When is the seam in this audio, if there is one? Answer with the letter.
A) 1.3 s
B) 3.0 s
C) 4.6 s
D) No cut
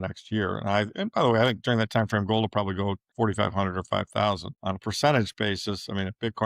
B